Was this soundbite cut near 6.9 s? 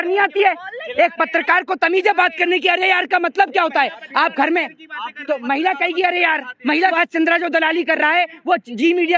yes; 1 cut; at 6.9 s

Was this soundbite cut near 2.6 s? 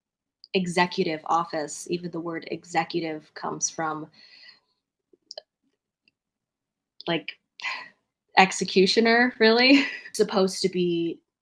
no; 1 cut; at 10.0 s

